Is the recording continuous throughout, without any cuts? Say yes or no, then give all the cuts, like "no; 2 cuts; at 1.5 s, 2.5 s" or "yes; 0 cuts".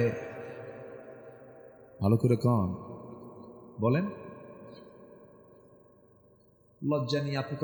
yes; 0 cuts